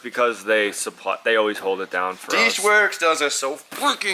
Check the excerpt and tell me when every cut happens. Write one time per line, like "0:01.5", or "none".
none